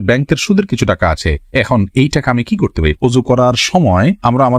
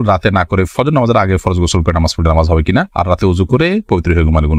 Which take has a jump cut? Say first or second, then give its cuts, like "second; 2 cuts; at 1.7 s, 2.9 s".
first; 1 cut; at 3.0 s